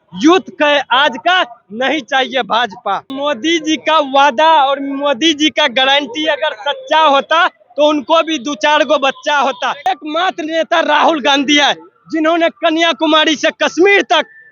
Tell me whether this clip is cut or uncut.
cut